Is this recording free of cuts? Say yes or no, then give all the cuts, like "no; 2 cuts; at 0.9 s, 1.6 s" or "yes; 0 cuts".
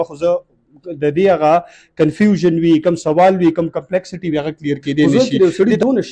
no; 1 cut; at 5.1 s